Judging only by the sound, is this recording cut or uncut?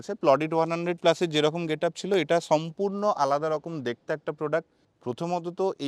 cut